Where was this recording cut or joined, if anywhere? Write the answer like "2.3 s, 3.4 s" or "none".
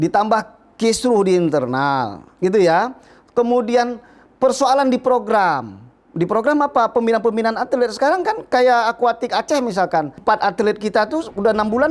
10.1 s